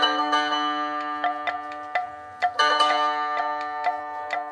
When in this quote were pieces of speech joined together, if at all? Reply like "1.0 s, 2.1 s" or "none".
none

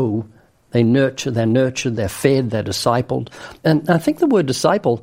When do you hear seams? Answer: 3.6 s

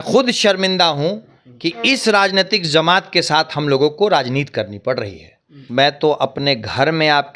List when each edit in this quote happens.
5.6 s

